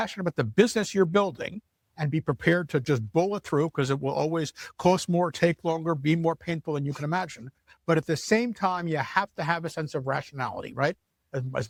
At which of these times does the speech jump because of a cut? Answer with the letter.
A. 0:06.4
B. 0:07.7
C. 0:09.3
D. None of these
D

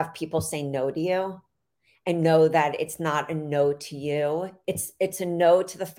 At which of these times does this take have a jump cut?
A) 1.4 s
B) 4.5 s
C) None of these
B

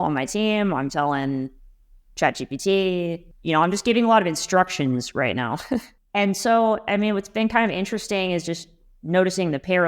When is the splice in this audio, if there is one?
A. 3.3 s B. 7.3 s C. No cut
A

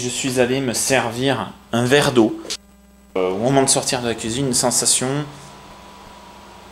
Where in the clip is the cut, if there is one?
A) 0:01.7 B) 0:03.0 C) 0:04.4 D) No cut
B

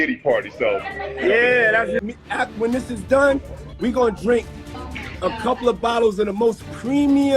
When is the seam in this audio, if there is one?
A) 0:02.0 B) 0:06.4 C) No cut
A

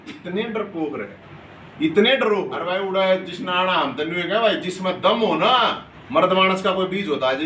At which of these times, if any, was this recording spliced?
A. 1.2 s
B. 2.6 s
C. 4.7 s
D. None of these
B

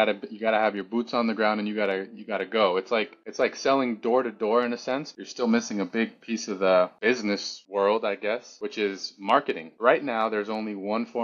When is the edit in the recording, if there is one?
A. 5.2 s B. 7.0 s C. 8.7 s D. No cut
A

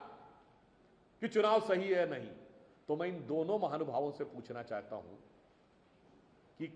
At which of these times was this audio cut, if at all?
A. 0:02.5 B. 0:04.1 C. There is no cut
C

